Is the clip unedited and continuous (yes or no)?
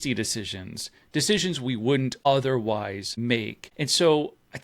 no